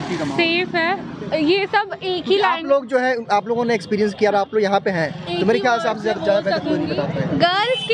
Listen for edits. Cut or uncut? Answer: uncut